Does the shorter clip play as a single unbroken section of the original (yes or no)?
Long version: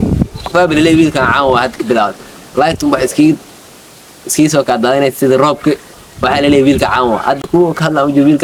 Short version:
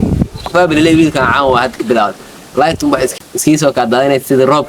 no